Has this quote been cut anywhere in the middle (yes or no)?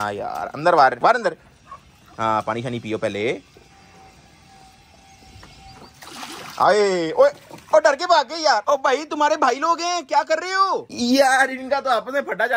no